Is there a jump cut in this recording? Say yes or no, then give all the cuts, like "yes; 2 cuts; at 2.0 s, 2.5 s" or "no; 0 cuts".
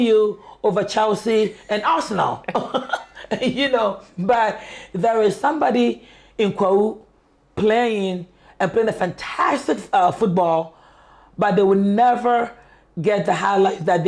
no; 0 cuts